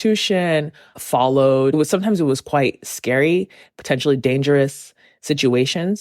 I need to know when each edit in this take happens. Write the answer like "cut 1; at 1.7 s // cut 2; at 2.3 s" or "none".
cut 1; at 1.7 s